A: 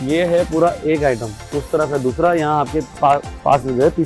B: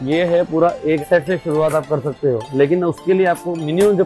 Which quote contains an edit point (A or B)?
B